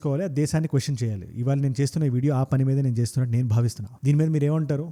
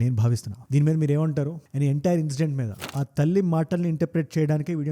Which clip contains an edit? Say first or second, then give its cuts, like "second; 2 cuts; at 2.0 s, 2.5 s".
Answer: second; 1 cut; at 2.8 s